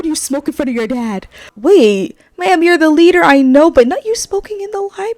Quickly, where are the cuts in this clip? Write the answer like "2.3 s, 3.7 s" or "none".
1.5 s